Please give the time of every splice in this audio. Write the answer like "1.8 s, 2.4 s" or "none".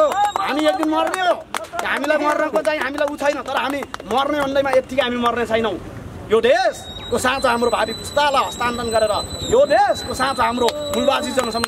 none